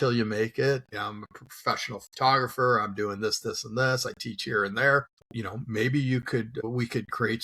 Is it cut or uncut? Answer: cut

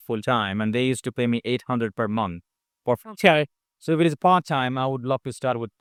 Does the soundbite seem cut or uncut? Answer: uncut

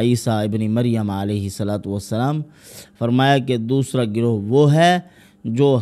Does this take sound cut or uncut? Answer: uncut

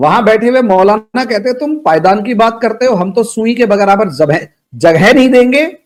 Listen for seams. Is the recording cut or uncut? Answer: uncut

